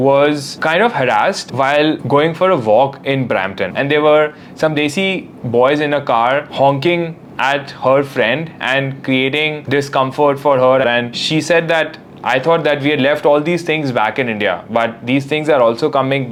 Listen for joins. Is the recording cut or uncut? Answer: uncut